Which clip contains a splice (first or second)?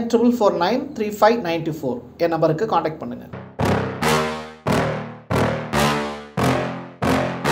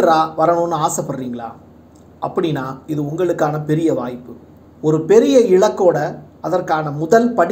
first